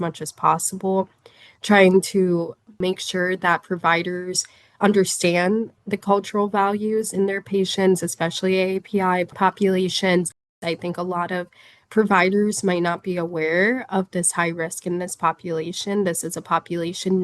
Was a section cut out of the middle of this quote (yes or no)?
yes